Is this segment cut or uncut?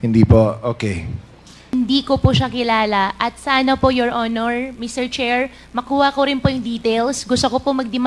cut